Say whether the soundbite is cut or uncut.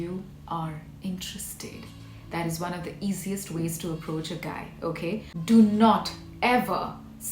cut